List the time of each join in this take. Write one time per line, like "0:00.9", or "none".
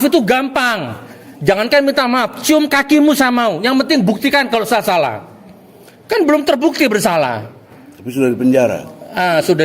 none